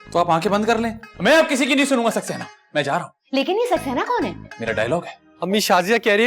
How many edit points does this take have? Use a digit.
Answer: 2